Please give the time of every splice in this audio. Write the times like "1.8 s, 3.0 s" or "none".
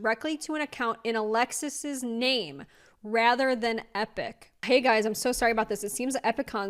4.6 s